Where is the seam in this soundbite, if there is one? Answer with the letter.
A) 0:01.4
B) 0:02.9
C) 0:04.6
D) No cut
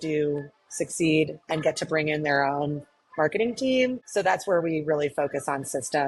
D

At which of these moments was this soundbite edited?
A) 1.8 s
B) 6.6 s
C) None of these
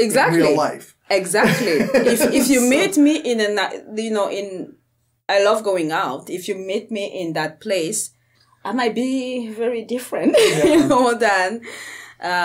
C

